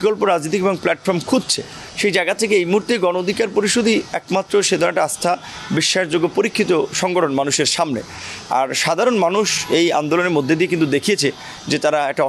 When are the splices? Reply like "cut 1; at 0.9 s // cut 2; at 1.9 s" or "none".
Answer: none